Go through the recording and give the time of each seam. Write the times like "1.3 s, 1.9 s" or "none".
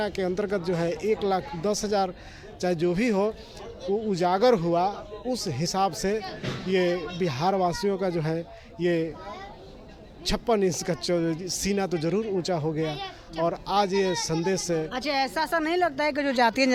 none